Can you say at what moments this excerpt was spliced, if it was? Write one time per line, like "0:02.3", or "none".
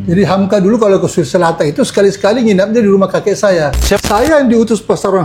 0:04.0